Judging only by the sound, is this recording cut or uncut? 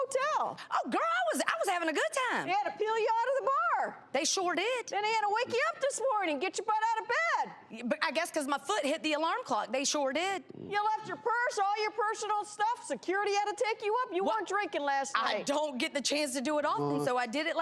uncut